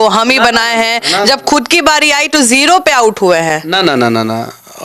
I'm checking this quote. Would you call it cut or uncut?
uncut